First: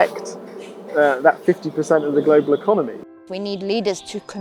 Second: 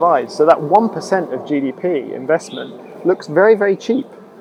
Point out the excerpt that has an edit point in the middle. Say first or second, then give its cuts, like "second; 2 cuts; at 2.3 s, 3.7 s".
first; 1 cut; at 2.9 s